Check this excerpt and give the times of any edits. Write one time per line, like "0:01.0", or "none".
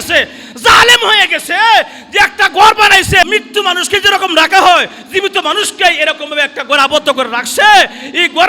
0:03.2